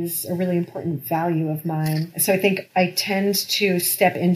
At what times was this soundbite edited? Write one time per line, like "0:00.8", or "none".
0:02.1